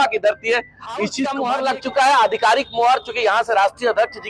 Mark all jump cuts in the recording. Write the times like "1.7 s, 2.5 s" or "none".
1.2 s